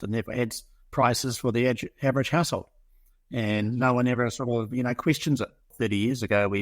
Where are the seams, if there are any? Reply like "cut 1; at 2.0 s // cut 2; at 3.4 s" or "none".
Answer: cut 1; at 5.7 s